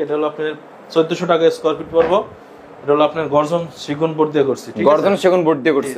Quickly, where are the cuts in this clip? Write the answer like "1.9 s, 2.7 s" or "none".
none